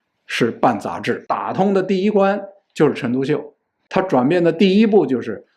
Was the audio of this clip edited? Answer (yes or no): yes